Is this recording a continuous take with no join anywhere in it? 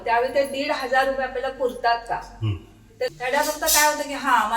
no; 1 cut; at 3.1 s

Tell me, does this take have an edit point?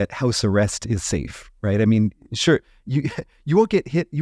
no; 0 cuts

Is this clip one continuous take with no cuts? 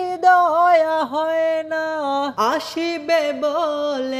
no; 1 cut; at 2.3 s

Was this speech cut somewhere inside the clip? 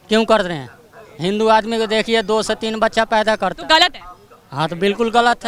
no; 0 cuts

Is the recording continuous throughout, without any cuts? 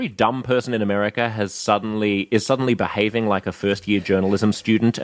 yes; 0 cuts

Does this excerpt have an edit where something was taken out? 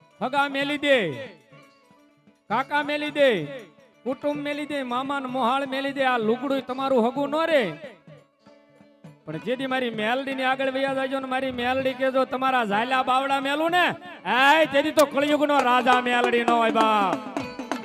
no; 0 cuts

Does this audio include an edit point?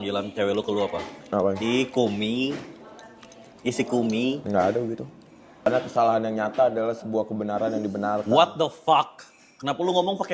yes; 1 cut; at 5.7 s

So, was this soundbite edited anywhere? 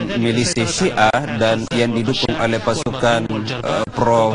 yes; 1 cut; at 2.8 s

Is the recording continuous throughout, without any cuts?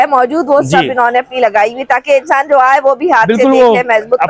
yes; 0 cuts

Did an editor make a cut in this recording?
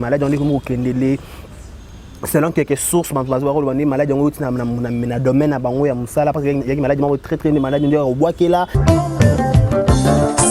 yes; 1 cut; at 8.8 s

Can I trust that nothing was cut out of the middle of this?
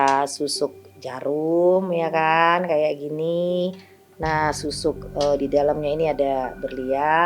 yes; 0 cuts

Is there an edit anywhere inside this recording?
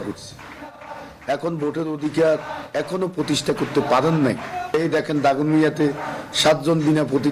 yes; 1 cut; at 4.7 s

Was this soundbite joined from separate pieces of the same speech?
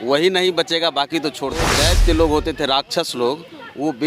yes; 1 cut; at 1.7 s

